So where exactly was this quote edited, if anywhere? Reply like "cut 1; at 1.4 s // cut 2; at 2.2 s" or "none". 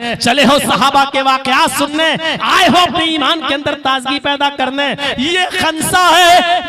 cut 1; at 5.1 s

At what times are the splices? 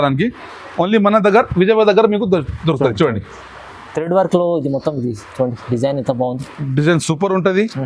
none

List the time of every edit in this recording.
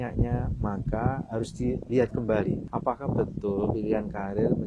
cut 1; at 2.7 s

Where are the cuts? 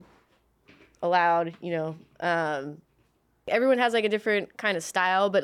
cut 1; at 3.5 s

